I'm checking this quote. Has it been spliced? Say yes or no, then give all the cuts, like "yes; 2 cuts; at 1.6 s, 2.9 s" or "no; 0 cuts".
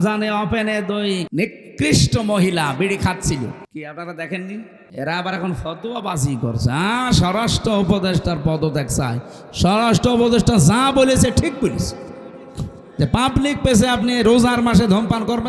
yes; 3 cuts; at 1.3 s, 3.6 s, 4.8 s